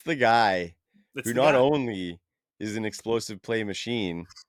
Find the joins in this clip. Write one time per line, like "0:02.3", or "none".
none